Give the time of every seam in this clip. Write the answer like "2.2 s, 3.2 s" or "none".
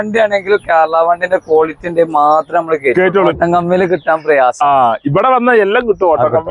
3.3 s